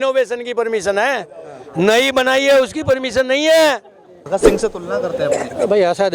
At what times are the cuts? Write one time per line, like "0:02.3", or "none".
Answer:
0:04.2